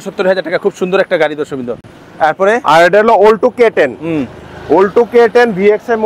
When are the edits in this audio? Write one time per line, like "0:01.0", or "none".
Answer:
none